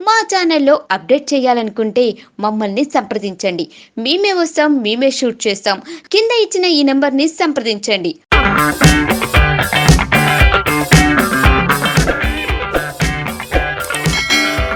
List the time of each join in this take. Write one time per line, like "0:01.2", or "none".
none